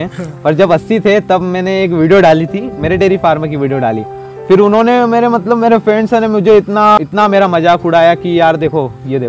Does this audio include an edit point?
yes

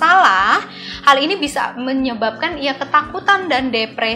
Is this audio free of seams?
yes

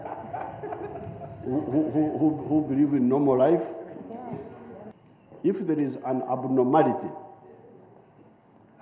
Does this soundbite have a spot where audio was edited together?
yes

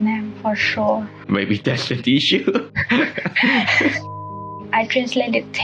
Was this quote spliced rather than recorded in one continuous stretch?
yes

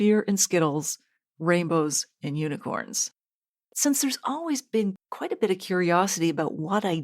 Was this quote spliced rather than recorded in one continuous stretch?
yes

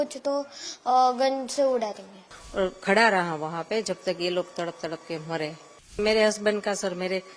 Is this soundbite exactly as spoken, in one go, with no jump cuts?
no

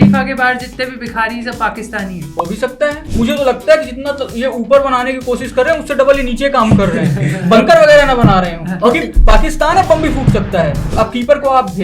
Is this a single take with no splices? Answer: no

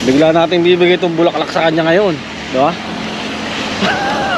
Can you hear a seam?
no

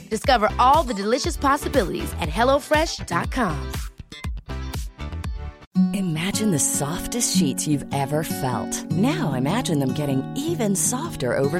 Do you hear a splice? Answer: yes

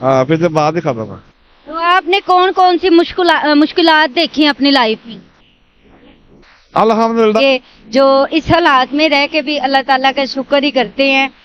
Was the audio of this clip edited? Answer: yes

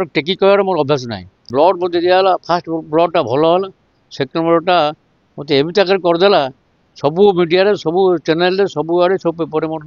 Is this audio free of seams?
no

